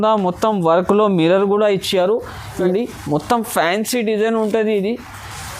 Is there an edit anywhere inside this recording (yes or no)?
yes